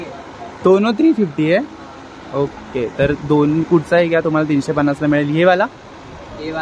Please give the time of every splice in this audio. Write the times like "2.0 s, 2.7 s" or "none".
none